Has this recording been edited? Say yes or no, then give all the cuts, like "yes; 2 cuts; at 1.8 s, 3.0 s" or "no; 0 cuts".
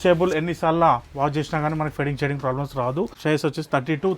yes; 1 cut; at 3.2 s